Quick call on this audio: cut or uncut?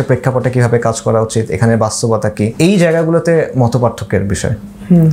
cut